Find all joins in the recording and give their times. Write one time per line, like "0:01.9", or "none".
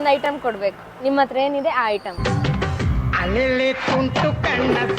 0:02.2